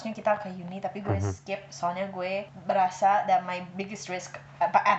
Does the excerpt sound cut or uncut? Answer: cut